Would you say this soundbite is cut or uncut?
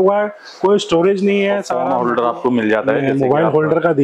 cut